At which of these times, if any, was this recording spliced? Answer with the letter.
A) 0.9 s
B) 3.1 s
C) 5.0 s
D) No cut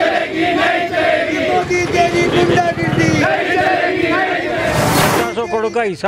C